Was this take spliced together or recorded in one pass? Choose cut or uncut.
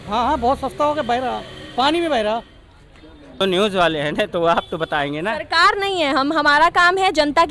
cut